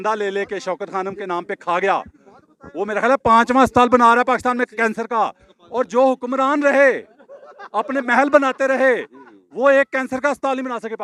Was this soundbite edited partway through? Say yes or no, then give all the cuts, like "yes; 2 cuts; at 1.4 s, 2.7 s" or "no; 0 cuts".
no; 0 cuts